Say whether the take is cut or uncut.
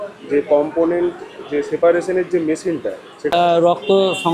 cut